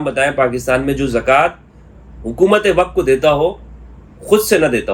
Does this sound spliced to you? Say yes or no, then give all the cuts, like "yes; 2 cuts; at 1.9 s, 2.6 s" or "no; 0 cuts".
no; 0 cuts